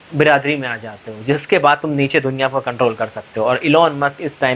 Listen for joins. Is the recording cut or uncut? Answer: uncut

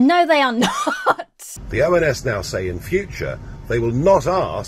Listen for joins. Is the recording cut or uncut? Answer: cut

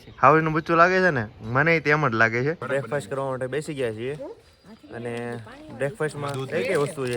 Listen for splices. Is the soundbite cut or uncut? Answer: cut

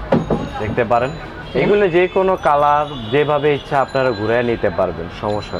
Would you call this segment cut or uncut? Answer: uncut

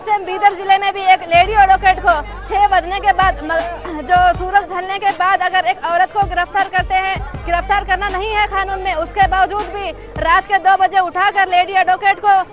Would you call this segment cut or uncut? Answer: uncut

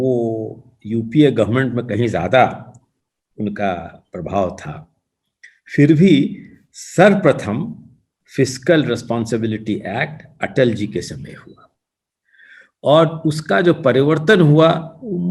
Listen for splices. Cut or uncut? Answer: uncut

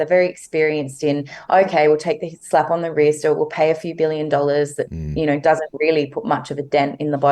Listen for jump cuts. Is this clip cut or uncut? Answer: uncut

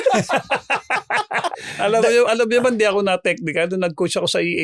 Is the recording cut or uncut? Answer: cut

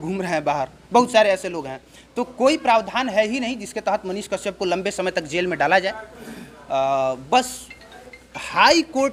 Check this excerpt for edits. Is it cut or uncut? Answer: uncut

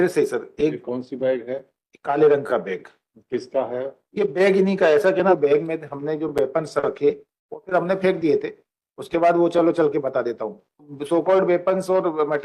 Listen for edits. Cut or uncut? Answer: cut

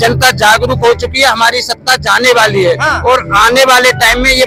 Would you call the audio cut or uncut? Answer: uncut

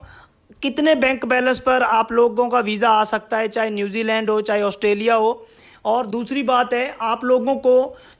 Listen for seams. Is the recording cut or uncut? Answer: uncut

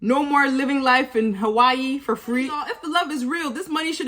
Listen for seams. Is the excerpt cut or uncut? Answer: cut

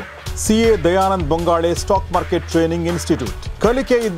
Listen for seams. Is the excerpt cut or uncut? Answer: uncut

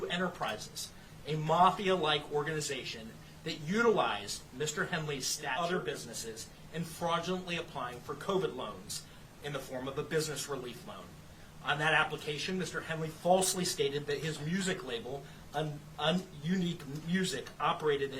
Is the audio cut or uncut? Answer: cut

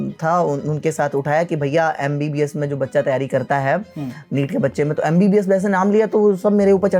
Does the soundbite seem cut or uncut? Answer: uncut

